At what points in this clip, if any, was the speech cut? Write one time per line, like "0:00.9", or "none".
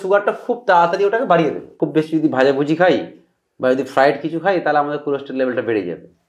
0:01.7